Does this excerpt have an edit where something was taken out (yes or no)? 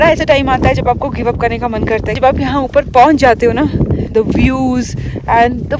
yes